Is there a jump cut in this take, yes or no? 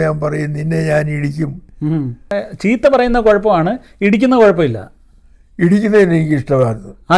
yes